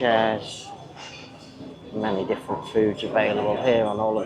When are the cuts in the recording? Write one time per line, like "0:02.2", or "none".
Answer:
none